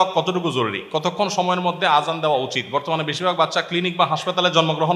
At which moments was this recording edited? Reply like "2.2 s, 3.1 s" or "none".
none